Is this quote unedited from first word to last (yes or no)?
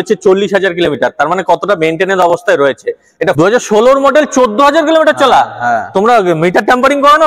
no